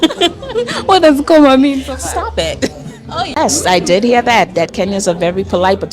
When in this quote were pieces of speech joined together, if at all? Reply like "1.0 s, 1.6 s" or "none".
3.4 s

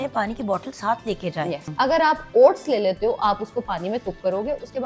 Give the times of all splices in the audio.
1.7 s

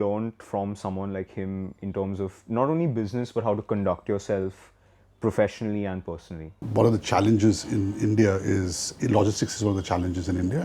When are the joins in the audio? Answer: 6.5 s

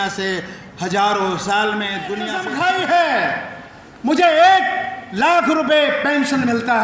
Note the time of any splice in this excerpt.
2.3 s

